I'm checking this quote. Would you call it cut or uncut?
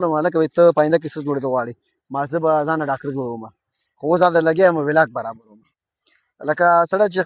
uncut